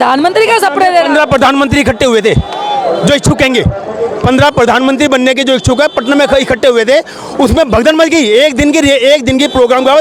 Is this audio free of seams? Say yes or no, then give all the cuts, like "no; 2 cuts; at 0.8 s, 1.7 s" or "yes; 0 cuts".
yes; 0 cuts